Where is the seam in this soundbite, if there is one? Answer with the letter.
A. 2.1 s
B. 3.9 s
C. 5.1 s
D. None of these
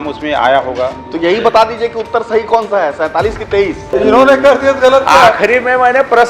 B